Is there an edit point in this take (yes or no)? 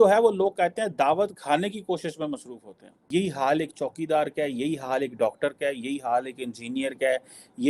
yes